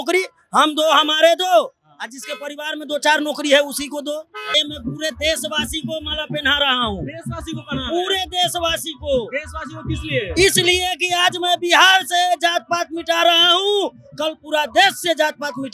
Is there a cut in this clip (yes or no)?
yes